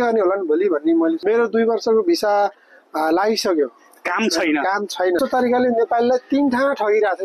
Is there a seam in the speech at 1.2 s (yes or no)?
yes